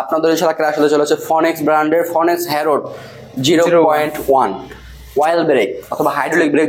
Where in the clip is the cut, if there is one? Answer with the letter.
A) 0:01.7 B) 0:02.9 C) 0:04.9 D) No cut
D